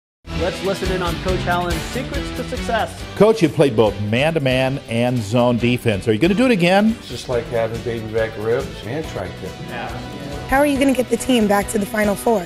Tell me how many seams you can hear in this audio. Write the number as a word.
two